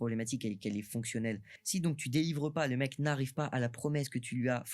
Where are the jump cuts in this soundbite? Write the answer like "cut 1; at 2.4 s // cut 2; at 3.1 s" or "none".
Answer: cut 1; at 1.5 s